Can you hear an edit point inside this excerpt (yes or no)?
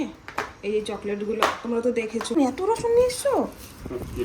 yes